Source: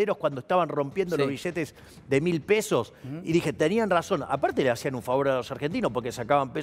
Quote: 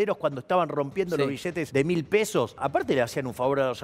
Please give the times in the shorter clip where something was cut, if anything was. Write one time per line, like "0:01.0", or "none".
0:01.6
0:02.6